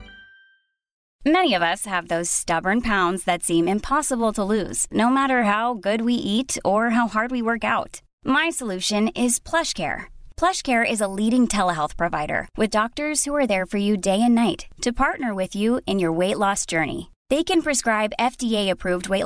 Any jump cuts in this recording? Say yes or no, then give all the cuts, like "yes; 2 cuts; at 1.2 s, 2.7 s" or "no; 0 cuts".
yes; 1 cut; at 1.0 s